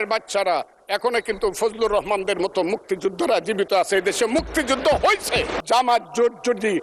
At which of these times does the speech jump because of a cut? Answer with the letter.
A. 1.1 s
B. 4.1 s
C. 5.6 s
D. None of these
C